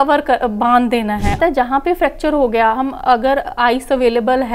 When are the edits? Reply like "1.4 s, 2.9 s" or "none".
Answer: 1.4 s